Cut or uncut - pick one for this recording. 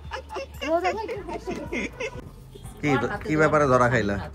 cut